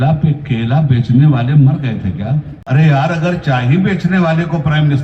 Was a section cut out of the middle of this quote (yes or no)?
yes